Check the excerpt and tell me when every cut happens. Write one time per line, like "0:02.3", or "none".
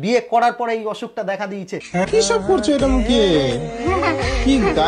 0:02.1